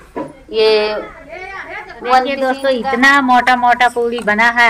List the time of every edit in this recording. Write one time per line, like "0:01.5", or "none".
0:02.4